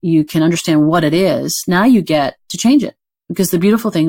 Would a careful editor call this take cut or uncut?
cut